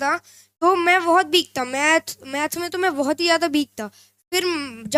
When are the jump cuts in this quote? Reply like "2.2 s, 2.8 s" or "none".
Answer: none